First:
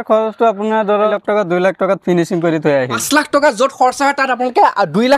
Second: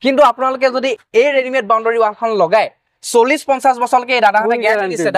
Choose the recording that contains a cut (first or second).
first